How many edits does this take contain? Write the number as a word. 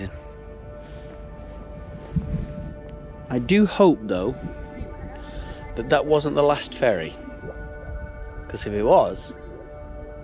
zero